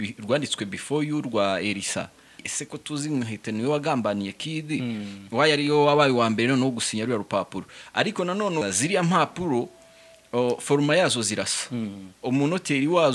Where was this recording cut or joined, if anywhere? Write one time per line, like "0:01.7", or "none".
0:02.4
0:08.6